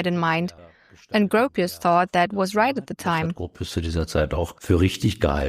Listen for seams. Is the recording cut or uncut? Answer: cut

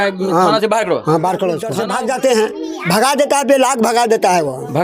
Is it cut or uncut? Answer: cut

